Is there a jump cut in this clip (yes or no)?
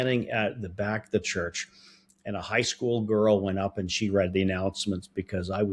no